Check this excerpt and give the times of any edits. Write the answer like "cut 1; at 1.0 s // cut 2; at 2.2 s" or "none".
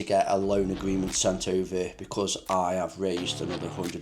none